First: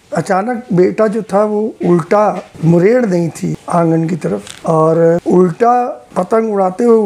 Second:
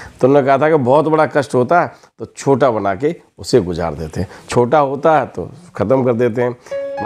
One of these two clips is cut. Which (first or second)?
first